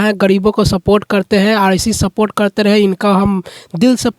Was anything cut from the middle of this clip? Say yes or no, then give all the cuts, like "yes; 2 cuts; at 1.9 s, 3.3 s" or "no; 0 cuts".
no; 0 cuts